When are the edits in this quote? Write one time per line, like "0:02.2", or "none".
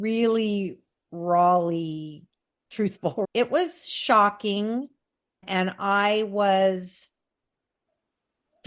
0:03.2